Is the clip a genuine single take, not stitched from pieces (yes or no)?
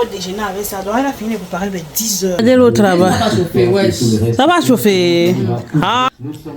no